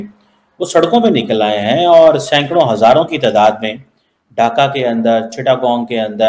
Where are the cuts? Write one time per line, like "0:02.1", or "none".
none